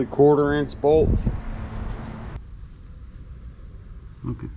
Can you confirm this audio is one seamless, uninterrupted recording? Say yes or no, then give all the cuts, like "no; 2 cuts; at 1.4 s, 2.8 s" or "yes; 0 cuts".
no; 1 cut; at 2.4 s